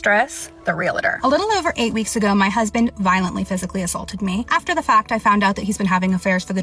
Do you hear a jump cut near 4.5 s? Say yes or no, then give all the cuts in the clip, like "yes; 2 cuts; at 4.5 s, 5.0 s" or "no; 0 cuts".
yes; 1 cut; at 4.5 s